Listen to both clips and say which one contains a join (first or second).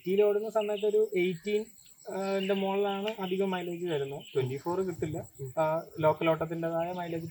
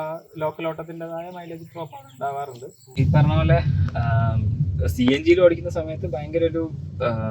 second